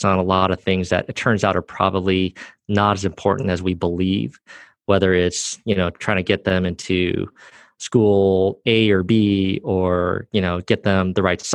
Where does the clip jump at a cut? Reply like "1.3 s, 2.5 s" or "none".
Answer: none